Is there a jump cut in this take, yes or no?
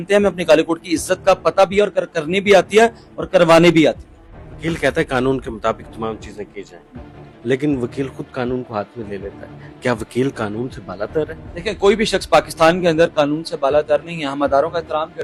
no